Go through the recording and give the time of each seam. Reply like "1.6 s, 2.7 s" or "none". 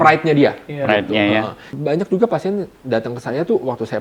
1.7 s